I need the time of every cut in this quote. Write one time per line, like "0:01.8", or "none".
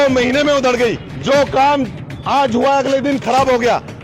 0:01.1